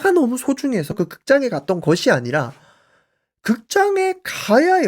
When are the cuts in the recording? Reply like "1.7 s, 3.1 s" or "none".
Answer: 0.9 s